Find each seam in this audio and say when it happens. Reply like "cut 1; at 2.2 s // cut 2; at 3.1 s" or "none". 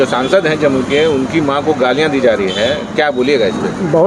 none